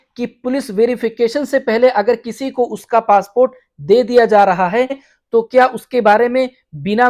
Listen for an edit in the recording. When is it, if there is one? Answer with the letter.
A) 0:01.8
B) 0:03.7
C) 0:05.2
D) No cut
D